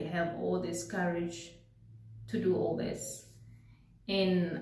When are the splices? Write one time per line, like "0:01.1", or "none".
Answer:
none